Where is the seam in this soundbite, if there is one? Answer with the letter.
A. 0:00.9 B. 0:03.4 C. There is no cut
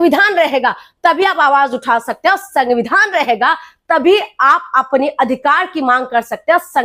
C